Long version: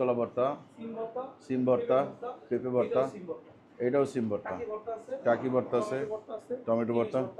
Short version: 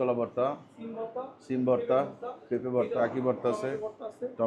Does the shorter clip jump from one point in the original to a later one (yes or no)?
yes